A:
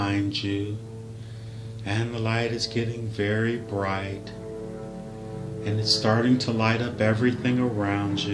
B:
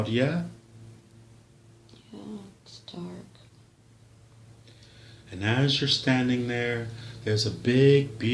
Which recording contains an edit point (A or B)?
A